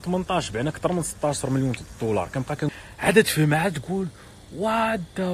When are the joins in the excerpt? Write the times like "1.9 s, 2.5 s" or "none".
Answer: 2.6 s